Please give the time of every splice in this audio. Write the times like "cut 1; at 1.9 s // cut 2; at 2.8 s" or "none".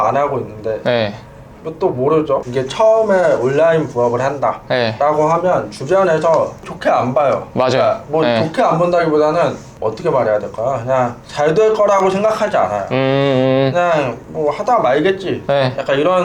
cut 1; at 2.5 s // cut 2; at 6.7 s // cut 3; at 9.7 s // cut 4; at 11.2 s // cut 5; at 14.2 s